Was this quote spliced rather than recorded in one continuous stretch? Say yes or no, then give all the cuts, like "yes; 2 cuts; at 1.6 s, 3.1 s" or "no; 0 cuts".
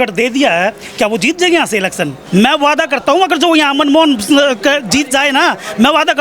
yes; 1 cut; at 2.2 s